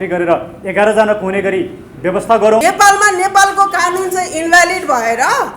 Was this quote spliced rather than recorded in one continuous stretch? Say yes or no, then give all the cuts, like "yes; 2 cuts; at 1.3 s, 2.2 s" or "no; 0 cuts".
yes; 1 cut; at 2.6 s